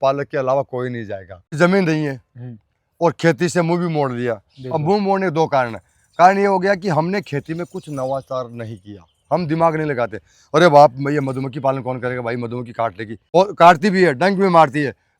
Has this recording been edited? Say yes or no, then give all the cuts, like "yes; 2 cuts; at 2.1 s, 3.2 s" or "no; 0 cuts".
yes; 2 cuts; at 1.3 s, 13.1 s